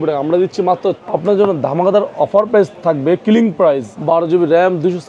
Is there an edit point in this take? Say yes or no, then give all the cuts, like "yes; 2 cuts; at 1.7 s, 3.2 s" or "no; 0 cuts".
yes; 3 cuts; at 1.0 s, 2.7 s, 3.9 s